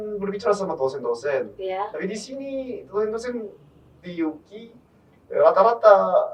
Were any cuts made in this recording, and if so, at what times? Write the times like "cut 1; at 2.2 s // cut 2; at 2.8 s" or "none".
none